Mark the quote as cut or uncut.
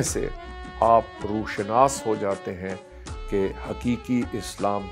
uncut